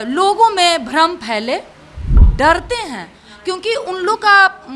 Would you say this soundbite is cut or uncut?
cut